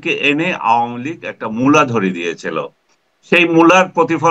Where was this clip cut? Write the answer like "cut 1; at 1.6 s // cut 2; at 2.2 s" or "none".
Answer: none